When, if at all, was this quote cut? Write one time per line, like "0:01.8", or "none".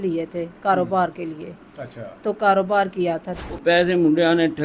0:03.3